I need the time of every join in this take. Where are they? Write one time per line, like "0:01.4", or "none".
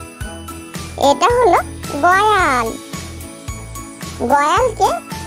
0:00.9